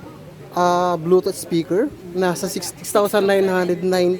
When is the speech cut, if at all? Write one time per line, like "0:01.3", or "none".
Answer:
0:02.6